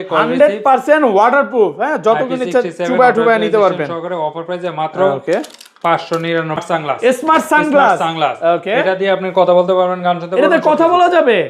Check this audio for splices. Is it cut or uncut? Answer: cut